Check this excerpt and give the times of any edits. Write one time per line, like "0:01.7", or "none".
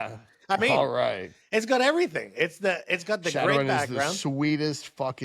none